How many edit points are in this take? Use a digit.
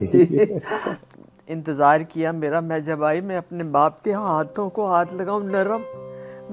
1